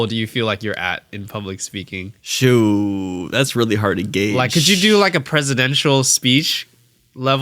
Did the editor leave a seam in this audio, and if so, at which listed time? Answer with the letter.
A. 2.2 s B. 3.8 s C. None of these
A